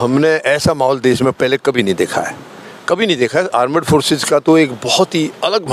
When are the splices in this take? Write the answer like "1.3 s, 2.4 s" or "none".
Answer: none